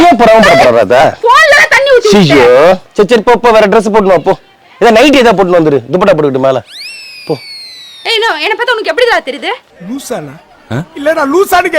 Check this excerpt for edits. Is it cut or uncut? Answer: cut